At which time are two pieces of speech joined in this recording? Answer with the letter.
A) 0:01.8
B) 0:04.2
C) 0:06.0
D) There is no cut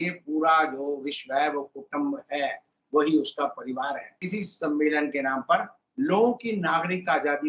B